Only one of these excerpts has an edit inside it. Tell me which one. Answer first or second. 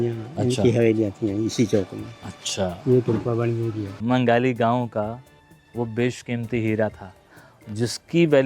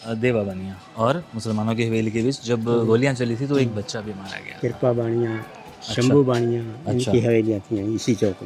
first